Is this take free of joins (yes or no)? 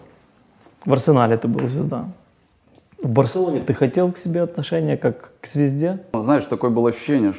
no